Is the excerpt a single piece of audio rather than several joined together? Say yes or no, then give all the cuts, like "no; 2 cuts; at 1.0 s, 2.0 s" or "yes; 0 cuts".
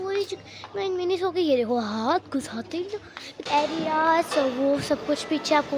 no; 1 cut; at 3.3 s